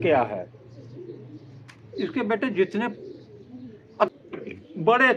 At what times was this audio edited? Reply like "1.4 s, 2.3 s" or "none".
4.1 s